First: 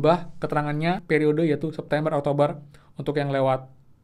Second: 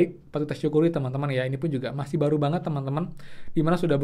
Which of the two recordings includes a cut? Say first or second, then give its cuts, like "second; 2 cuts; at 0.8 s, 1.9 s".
first; 1 cut; at 1.0 s